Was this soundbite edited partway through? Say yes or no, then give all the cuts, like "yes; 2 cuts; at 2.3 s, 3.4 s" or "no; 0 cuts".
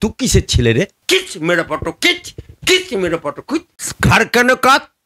yes; 2 cuts; at 1.0 s, 3.8 s